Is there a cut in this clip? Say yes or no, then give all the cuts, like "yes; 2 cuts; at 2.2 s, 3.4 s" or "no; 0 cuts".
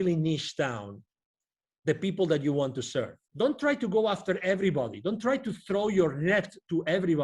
yes; 1 cut; at 3.2 s